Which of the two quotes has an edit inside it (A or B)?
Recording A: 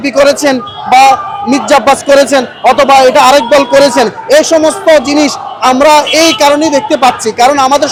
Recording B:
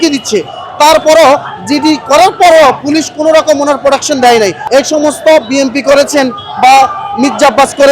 B